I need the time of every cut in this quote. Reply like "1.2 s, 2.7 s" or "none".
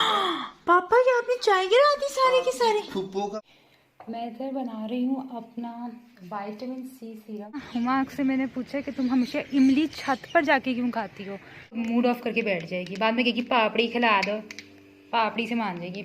3.4 s, 7.7 s, 11.8 s